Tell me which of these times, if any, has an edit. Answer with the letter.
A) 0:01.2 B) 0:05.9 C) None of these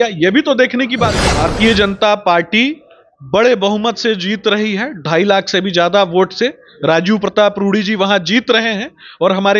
A